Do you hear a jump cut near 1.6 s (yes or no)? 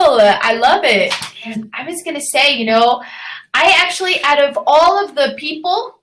yes